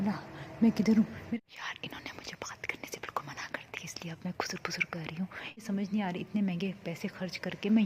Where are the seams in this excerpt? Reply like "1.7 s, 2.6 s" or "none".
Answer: 1.4 s, 5.6 s

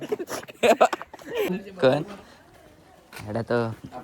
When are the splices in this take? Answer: 1.5 s

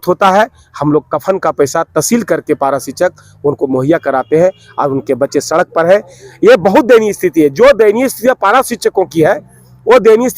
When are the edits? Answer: none

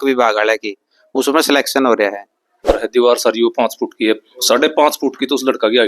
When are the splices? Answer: 2.7 s

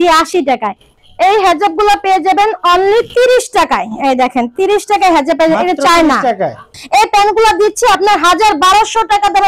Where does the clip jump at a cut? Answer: 0.9 s, 6.8 s

